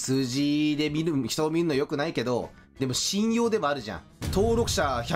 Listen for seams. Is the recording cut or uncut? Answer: uncut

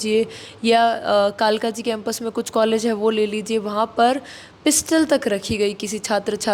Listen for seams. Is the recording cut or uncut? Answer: uncut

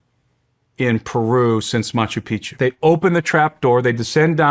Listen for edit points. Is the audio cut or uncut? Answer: cut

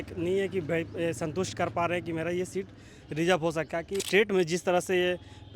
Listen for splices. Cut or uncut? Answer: cut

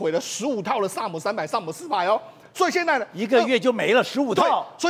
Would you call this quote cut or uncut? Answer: uncut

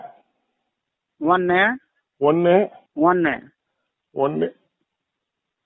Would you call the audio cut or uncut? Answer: cut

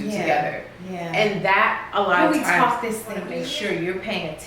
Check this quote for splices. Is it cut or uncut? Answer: cut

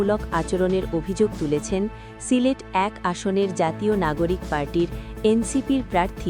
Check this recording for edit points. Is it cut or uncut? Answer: uncut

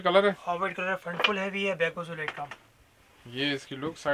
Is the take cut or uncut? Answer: uncut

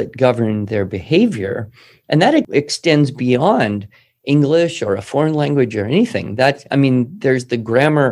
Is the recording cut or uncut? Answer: cut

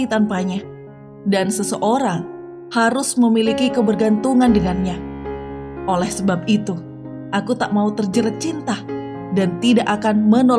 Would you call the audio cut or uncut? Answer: uncut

